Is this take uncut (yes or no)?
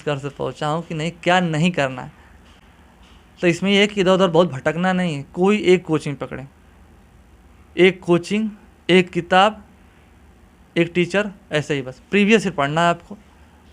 yes